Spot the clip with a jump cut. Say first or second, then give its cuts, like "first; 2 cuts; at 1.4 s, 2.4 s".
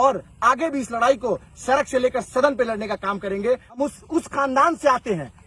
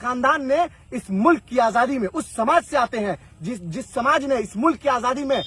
first; 1 cut; at 3.8 s